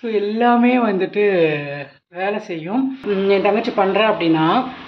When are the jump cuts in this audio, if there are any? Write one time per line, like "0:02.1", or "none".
0:03.0